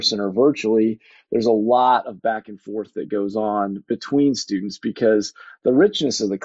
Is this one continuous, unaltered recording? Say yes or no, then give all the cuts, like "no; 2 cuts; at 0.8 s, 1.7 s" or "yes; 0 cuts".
yes; 0 cuts